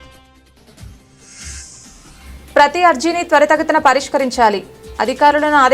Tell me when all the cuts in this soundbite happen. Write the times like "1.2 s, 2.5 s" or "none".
none